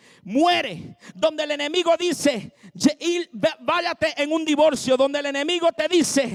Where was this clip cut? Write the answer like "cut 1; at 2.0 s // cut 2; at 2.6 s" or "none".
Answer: none